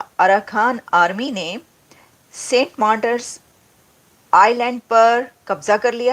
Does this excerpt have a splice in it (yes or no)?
no